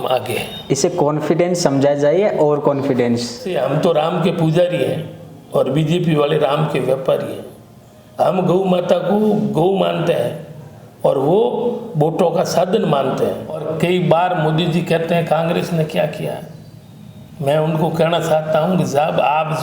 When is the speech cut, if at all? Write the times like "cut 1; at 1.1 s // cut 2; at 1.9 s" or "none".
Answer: cut 1; at 3.5 s // cut 2; at 13.7 s